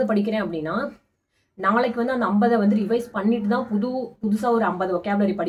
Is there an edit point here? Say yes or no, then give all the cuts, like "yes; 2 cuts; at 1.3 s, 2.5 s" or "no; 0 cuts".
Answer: no; 0 cuts